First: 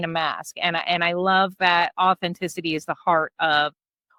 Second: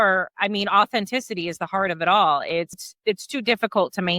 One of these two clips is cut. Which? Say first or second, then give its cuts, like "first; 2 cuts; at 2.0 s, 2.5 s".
second; 1 cut; at 2.9 s